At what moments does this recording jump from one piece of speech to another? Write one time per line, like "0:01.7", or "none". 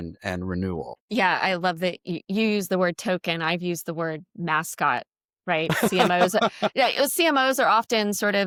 none

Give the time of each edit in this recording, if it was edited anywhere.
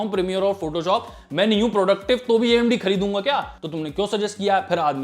0:03.6

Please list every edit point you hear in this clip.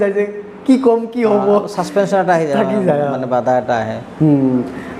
none

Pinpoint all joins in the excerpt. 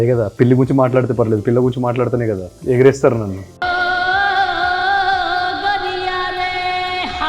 0:03.4

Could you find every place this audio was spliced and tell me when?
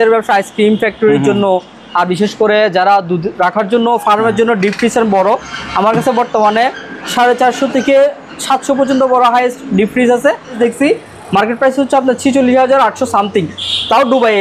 0:10.6

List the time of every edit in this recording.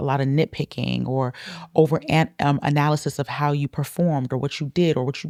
none

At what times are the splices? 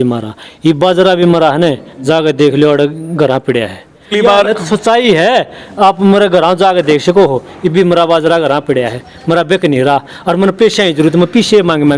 0:04.1

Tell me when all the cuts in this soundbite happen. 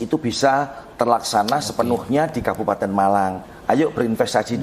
0:03.4

